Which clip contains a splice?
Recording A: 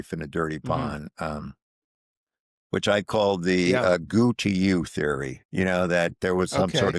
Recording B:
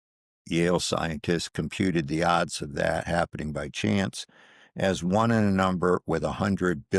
A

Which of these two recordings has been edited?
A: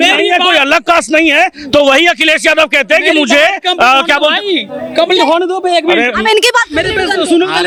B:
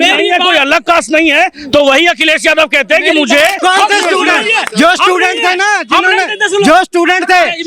B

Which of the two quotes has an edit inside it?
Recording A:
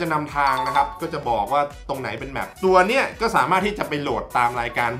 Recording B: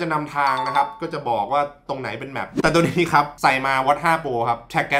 B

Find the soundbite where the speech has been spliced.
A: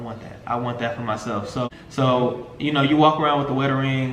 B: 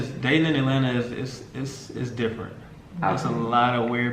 A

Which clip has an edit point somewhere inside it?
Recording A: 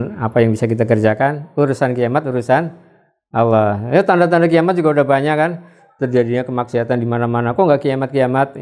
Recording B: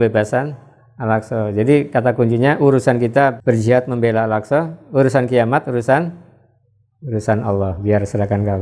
B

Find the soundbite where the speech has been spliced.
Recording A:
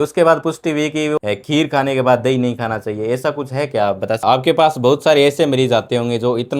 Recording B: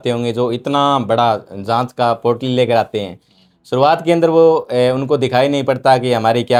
A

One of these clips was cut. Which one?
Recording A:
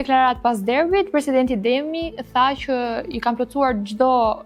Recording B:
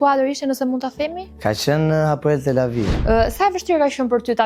B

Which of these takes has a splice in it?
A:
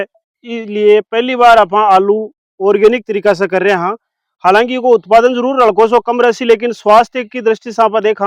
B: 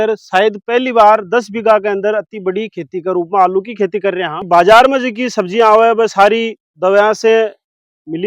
B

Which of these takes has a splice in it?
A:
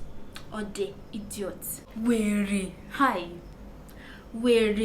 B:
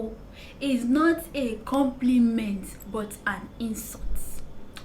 A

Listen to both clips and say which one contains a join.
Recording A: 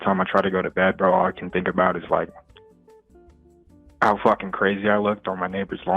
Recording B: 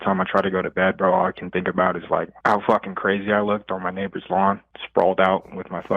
B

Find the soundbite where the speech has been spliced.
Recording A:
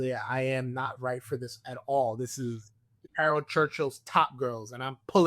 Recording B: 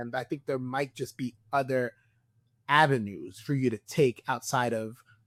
A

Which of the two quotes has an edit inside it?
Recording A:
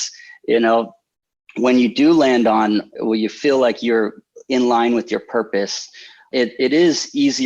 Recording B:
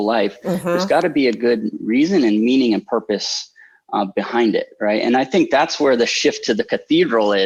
A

